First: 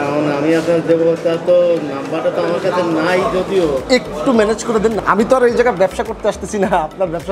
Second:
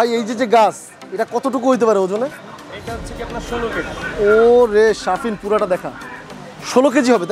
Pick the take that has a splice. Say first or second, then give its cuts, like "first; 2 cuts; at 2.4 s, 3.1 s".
first; 1 cut; at 5.0 s